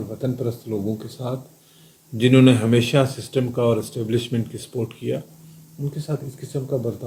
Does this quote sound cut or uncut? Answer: uncut